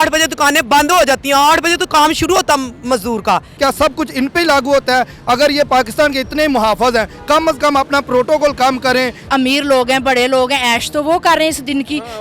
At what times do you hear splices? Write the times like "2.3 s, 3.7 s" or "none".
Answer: 3.5 s, 9.2 s